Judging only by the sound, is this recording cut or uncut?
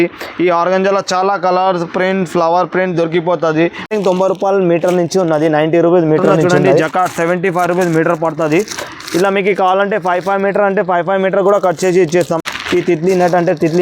cut